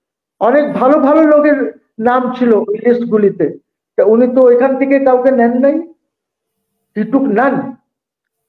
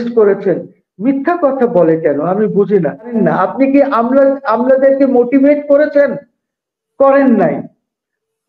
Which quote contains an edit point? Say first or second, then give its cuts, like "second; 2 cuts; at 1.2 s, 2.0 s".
second; 1 cut; at 3.1 s